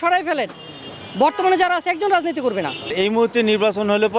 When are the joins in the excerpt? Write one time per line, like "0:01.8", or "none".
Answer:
0:02.8